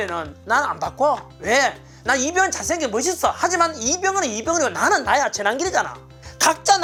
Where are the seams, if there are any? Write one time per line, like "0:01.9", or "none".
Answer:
none